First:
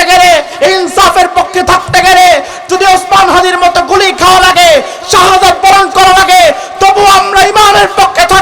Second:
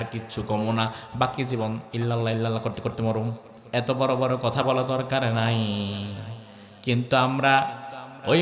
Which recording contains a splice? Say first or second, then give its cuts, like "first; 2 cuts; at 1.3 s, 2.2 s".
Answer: second; 1 cut; at 3.5 s